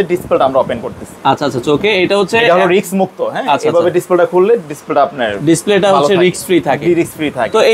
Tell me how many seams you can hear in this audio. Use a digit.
0